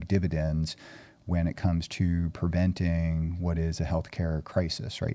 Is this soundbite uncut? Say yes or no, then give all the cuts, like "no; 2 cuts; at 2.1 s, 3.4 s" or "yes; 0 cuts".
yes; 0 cuts